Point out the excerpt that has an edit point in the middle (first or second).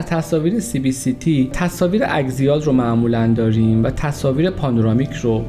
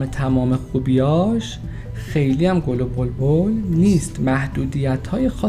first